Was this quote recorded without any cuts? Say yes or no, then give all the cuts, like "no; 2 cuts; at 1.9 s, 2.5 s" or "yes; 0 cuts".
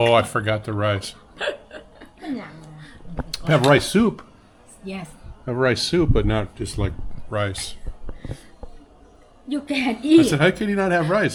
yes; 0 cuts